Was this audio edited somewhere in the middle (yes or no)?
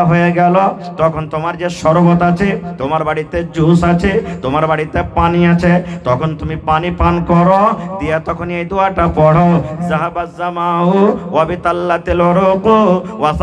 no